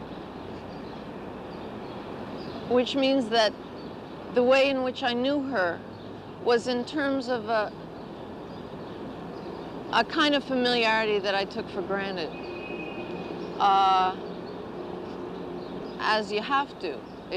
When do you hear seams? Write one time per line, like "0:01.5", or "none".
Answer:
0:12.7